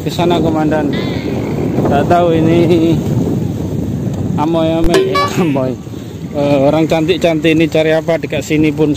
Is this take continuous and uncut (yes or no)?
yes